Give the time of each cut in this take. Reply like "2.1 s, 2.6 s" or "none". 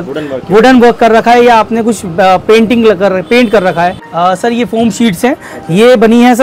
4.0 s